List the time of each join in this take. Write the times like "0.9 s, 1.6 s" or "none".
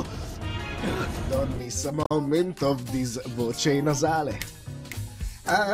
2.1 s